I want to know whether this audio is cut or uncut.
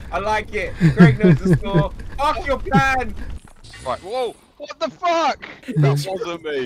cut